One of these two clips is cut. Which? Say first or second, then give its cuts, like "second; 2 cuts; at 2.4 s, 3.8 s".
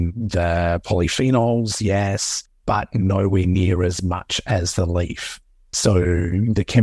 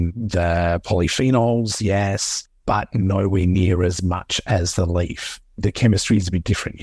second; 1 cut; at 5.6 s